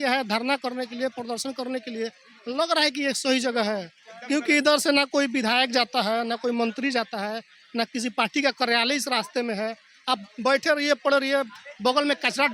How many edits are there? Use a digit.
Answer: 0